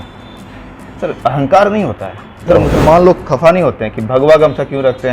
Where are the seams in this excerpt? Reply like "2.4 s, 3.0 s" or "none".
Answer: 2.4 s